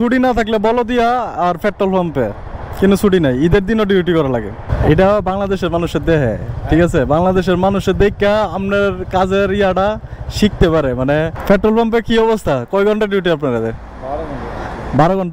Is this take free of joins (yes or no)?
no